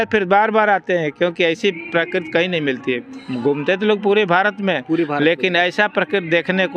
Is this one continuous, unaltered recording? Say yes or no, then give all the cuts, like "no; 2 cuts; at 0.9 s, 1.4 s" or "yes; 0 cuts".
yes; 0 cuts